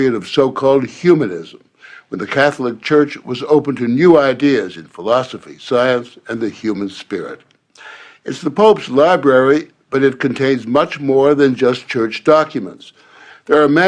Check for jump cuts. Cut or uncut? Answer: uncut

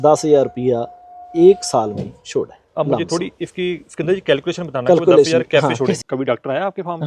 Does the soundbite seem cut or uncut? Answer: cut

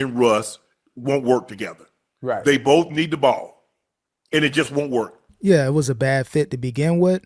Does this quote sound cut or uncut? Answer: cut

